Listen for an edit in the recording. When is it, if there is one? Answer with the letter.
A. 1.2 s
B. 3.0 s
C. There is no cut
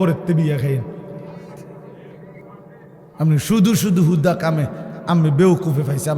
B